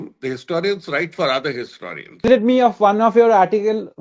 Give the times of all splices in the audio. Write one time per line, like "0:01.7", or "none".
0:02.3